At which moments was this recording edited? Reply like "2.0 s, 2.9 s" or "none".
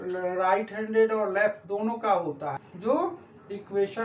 2.7 s